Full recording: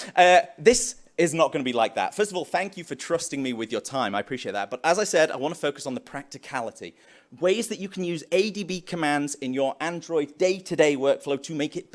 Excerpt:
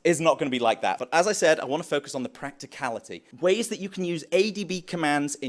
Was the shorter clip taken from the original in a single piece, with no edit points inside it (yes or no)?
no